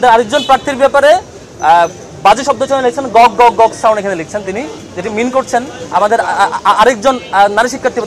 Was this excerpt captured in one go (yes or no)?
yes